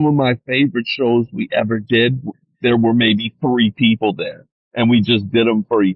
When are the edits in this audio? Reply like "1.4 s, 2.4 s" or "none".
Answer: none